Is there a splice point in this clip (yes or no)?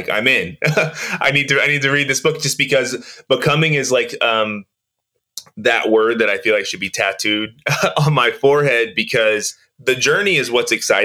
yes